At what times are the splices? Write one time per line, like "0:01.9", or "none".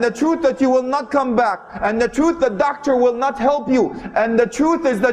none